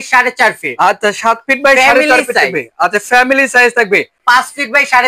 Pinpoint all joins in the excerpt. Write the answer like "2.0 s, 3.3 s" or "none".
4.2 s